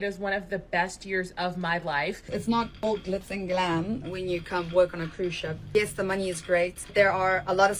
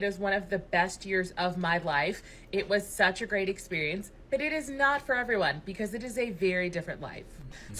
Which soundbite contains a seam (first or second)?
first